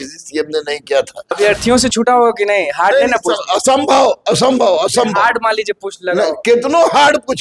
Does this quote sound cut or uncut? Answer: cut